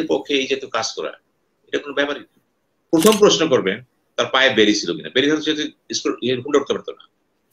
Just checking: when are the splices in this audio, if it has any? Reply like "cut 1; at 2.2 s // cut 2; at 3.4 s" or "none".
cut 1; at 2.9 s